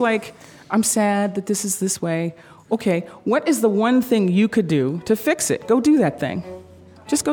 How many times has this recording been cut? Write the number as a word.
zero